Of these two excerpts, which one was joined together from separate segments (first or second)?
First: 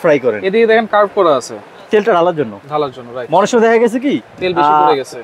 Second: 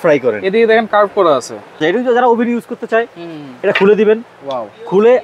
second